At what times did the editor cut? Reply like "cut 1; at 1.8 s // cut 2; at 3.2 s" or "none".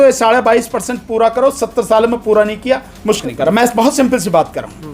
cut 1; at 3.2 s